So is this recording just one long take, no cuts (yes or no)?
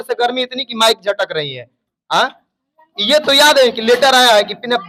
yes